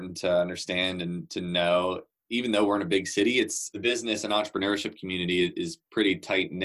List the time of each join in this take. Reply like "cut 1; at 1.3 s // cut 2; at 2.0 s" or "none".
cut 1; at 3.6 s

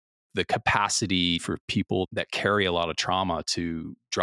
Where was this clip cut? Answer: cut 1; at 2.1 s

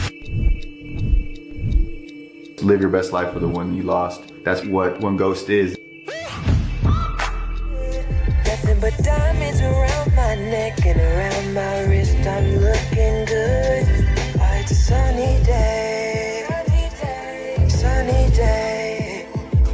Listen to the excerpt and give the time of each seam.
none

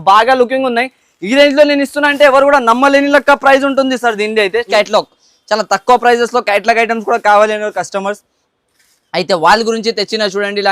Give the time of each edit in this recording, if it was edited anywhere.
cut 1; at 4.7 s

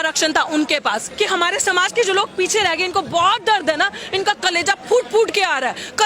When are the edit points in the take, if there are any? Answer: cut 1; at 1.1 s

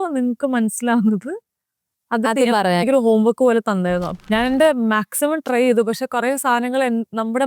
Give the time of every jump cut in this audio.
cut 1; at 4.1 s

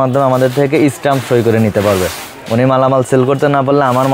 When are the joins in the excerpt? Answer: none

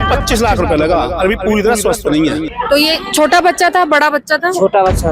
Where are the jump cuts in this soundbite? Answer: cut 1; at 2.5 s

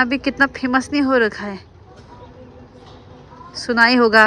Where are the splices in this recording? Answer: none

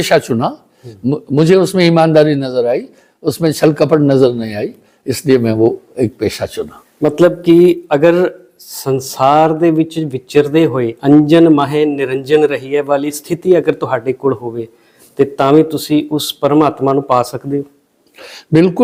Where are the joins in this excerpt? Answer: none

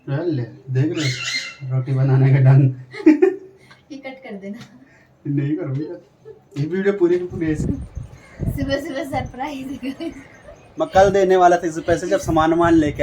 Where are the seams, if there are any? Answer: cut 1; at 7.6 s

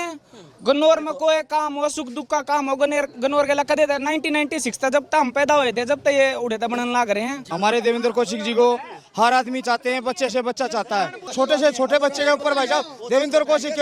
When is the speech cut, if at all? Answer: cut 1; at 7.5 s // cut 2; at 11.2 s

